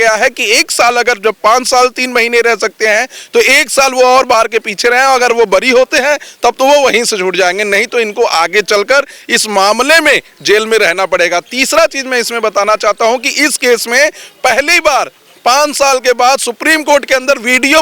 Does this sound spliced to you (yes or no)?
no